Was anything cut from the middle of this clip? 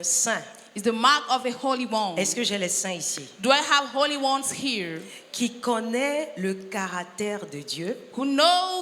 no; 0 cuts

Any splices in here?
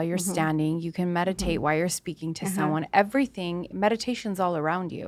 no; 0 cuts

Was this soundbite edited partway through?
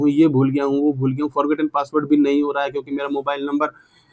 no; 0 cuts

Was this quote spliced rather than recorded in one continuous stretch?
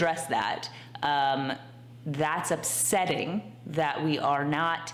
no; 0 cuts

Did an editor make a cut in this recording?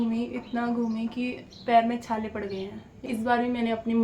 yes; 1 cut; at 3.0 s

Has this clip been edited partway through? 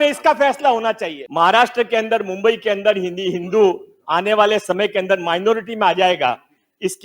yes; 1 cut; at 1.2 s

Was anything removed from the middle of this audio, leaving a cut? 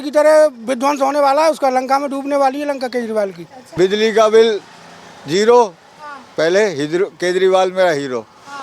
yes; 1 cut; at 3.6 s

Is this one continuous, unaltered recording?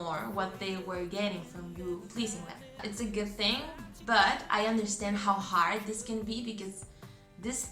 no; 1 cut; at 2.8 s

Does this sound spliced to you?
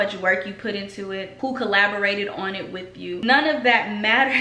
yes; 2 cuts; at 1.3 s, 3.2 s

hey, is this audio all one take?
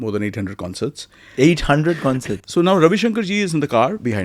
no; 1 cut; at 2.3 s

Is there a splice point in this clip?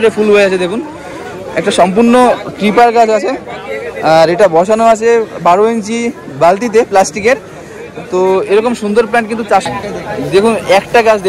yes; 1 cut; at 9.7 s

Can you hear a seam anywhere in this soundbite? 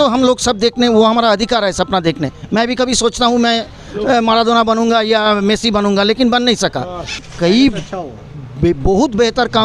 yes; 1 cut; at 7.3 s

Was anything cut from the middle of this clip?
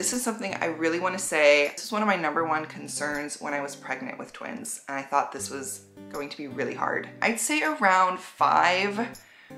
yes; 1 cut; at 7.1 s

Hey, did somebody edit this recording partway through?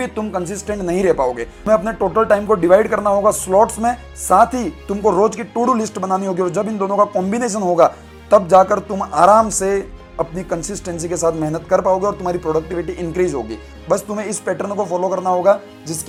no; 0 cuts

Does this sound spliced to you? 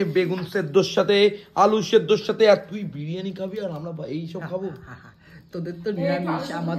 no; 0 cuts

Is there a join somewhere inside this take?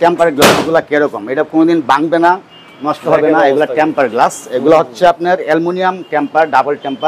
no; 0 cuts

